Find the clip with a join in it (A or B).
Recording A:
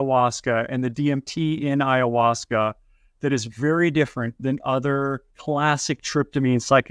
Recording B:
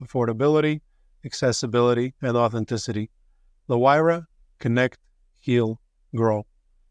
A